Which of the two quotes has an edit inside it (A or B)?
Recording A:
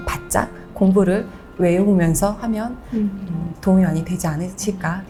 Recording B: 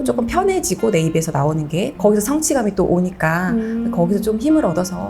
B